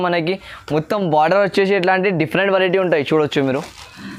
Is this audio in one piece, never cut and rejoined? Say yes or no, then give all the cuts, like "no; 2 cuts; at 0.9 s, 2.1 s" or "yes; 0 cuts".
yes; 0 cuts